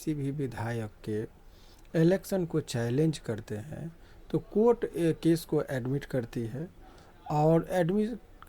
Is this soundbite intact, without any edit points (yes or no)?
yes